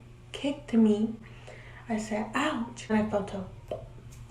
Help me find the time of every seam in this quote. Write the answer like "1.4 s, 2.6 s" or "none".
2.9 s